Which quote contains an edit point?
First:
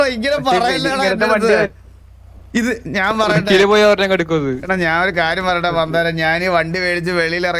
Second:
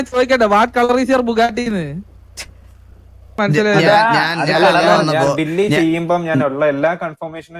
second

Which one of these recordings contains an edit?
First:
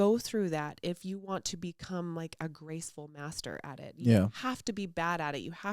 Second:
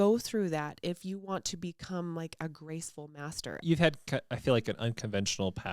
second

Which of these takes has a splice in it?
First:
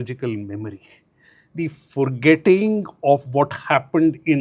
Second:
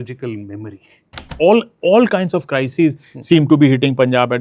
second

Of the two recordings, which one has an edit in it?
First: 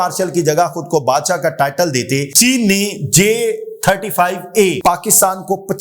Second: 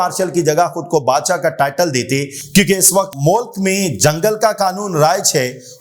first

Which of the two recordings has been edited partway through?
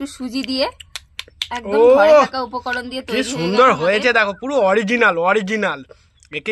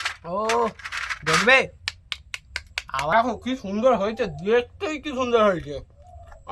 second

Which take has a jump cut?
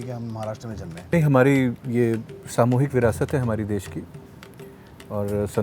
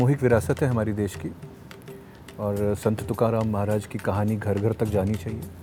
first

